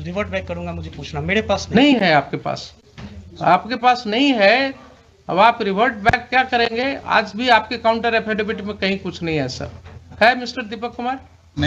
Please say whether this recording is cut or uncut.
uncut